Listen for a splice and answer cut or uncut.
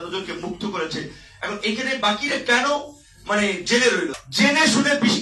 cut